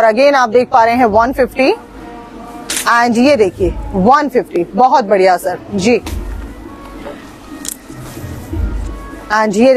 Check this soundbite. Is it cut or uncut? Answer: uncut